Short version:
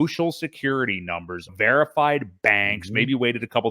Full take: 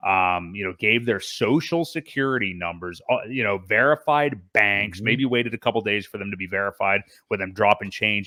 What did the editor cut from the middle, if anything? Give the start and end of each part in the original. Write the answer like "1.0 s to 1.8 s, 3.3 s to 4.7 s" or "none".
3.0 s to 3.6 s